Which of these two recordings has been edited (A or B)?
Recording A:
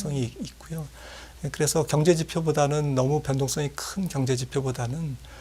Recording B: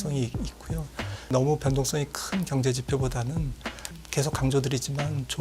B